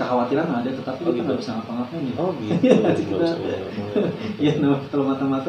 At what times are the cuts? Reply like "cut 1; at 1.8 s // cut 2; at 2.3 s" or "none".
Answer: none